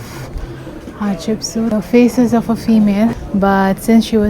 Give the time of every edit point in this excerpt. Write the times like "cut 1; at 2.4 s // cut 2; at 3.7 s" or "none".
cut 1; at 1.7 s // cut 2; at 3.2 s